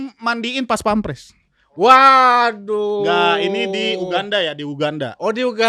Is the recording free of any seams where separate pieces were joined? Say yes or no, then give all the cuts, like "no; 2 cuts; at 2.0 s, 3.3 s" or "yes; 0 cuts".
yes; 0 cuts